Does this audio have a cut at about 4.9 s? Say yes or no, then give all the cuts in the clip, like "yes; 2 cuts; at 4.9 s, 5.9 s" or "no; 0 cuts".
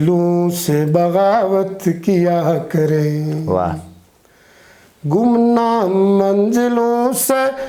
no; 0 cuts